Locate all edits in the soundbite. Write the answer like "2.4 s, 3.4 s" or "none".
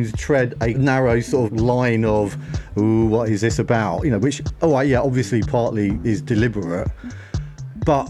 0.8 s, 1.5 s